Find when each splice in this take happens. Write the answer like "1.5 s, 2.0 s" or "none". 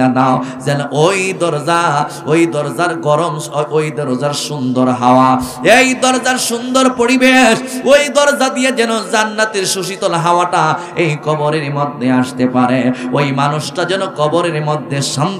none